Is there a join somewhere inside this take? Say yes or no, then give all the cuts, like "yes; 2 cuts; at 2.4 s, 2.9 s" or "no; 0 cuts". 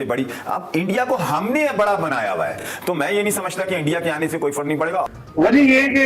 yes; 1 cut; at 5.1 s